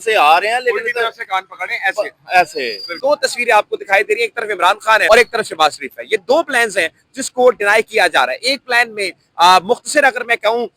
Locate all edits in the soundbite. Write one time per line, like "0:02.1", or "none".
0:02.9
0:05.0